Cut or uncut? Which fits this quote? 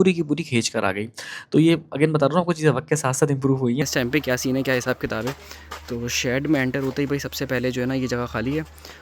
cut